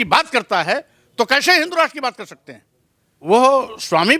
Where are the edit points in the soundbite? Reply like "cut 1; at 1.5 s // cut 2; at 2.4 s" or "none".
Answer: cut 1; at 3.3 s